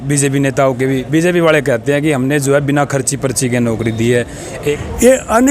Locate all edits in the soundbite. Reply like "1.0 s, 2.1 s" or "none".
4.5 s

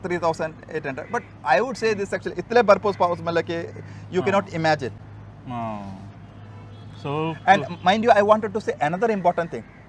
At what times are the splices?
none

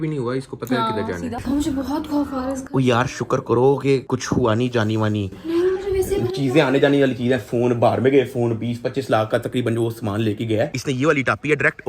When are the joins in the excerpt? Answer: 1.3 s, 10.7 s

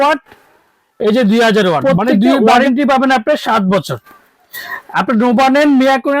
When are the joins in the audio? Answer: 2.5 s

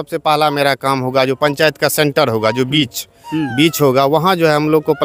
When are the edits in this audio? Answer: none

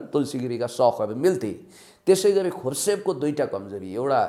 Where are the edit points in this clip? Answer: none

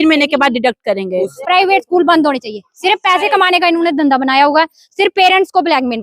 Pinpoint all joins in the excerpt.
1.3 s

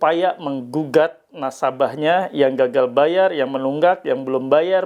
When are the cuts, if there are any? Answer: none

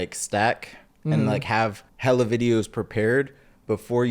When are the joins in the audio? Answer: 1.9 s

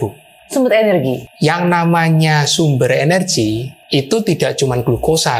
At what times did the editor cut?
1.3 s

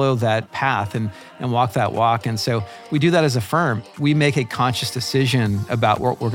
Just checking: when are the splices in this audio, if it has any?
3.9 s

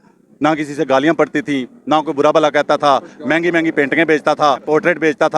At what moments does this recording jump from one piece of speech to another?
none

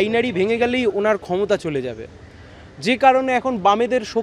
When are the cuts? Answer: none

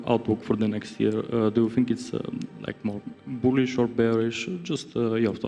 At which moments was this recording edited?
none

